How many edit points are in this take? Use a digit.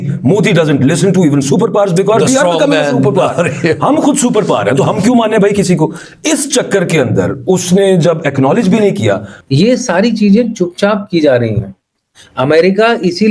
1